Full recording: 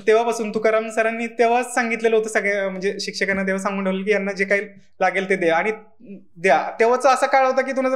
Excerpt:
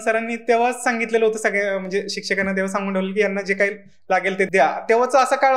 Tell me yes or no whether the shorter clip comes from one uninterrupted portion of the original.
no